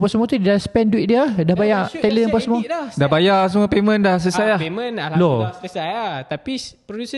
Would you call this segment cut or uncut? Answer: uncut